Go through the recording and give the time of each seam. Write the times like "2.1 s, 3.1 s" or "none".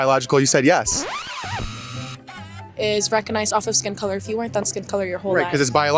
none